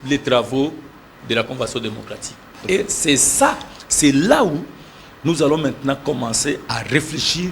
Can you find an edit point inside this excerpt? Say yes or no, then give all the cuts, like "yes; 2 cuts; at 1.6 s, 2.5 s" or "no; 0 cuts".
no; 0 cuts